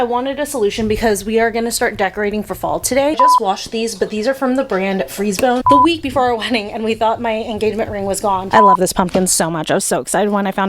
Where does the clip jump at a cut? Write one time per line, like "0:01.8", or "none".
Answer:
0:03.2
0:05.6
0:08.5